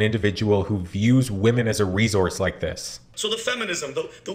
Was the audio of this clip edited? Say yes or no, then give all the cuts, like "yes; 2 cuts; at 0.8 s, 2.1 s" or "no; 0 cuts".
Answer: yes; 1 cut; at 3.1 s